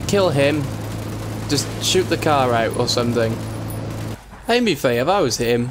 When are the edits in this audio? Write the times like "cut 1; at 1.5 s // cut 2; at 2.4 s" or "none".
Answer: cut 1; at 4.1 s